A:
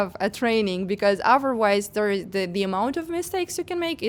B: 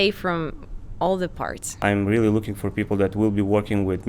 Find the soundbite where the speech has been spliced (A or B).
B